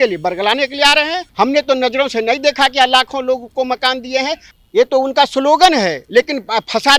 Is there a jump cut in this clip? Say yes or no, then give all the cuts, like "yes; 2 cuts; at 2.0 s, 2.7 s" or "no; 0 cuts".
yes; 2 cuts; at 1.2 s, 4.4 s